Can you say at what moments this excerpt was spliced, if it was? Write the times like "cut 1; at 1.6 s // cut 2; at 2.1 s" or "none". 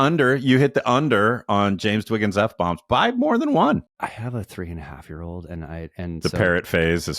cut 1; at 3.9 s // cut 2; at 6.2 s